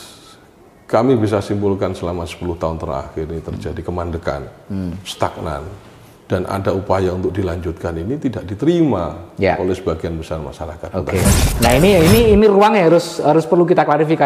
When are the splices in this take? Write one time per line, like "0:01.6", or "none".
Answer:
0:11.4

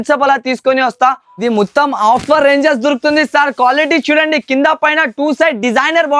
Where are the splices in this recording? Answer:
0:01.3

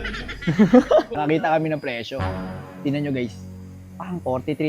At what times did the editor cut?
0:01.1

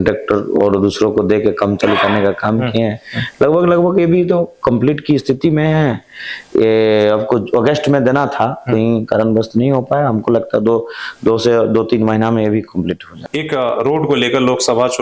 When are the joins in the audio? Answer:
0:13.1

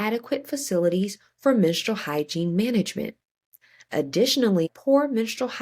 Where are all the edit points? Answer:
0:04.7

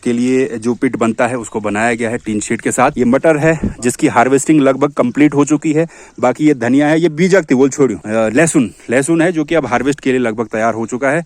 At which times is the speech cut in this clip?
0:02.9
0:08.0

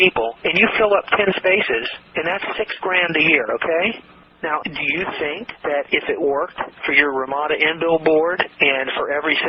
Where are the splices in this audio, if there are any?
0:02.1
0:04.2

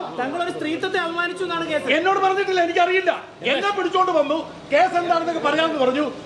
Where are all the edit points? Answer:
none

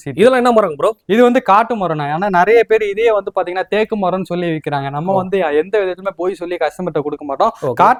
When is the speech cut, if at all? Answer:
none

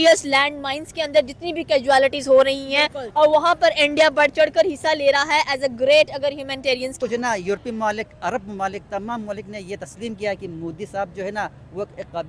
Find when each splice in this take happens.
0:07.0

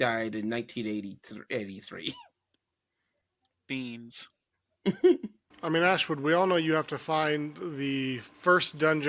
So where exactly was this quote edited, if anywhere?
none

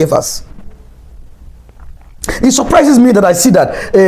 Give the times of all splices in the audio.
none

